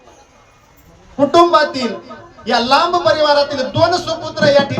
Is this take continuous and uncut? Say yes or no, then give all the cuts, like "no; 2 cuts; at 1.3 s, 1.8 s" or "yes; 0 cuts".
yes; 0 cuts